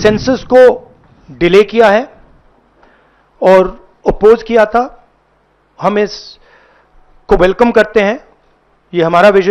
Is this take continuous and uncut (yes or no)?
yes